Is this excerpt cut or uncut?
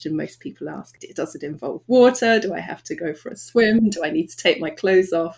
cut